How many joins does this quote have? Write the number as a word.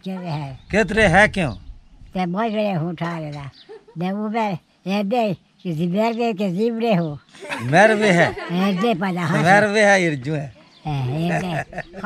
zero